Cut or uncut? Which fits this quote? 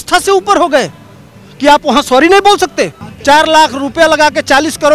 cut